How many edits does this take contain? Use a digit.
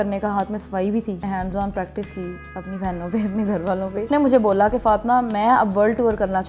2